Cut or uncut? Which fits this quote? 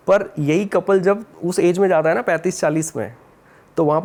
uncut